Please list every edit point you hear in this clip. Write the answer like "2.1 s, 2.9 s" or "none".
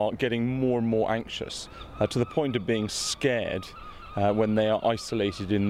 none